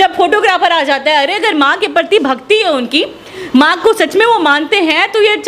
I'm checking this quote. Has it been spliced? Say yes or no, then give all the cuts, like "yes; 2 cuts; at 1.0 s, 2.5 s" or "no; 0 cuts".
no; 0 cuts